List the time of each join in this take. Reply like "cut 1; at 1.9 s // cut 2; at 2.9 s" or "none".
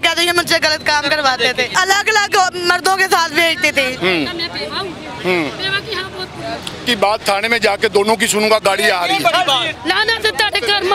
cut 1; at 1.7 s // cut 2; at 4.0 s // cut 3; at 6.8 s // cut 4; at 9.7 s